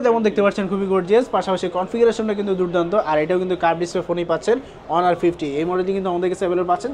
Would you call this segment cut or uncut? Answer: uncut